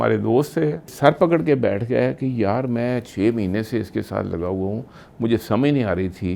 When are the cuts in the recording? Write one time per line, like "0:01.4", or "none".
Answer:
0:00.9

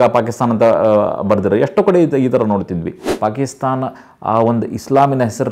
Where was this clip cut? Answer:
0:03.1

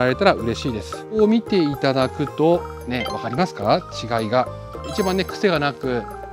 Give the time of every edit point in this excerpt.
0:01.2
0:04.9

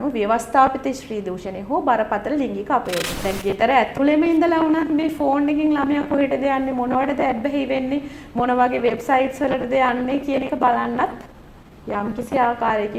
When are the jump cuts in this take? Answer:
0:03.1

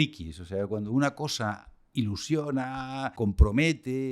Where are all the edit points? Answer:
0:01.7
0:03.1

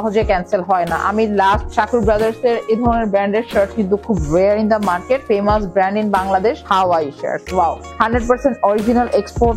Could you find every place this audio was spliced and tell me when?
0:01.7
0:05.2
0:06.6
0:07.9

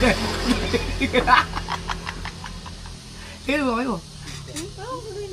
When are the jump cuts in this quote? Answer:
none

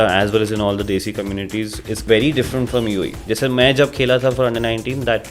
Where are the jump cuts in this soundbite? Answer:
0:02.0

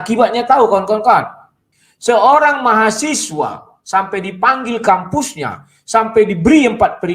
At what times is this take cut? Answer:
none

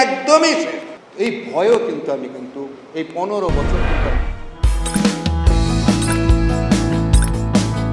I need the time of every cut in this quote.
none

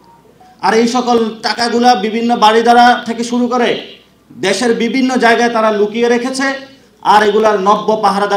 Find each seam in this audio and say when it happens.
none

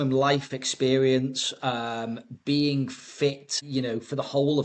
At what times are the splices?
0:03.5

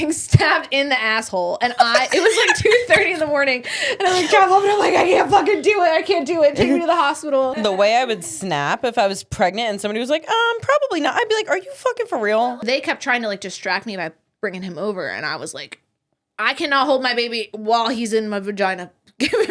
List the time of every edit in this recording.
0:07.6
0:12.5

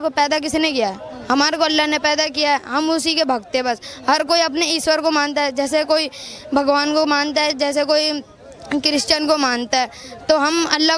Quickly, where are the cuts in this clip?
none

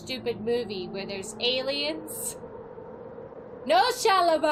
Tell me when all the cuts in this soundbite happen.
none

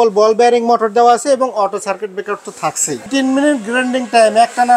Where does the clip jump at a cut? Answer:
0:03.1

